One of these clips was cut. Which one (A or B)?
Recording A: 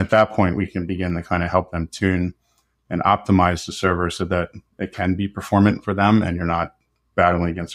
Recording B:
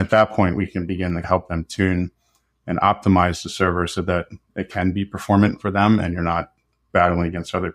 B